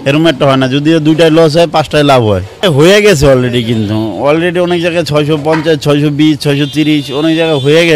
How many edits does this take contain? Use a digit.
1